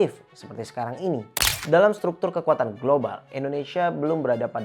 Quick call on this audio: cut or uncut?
cut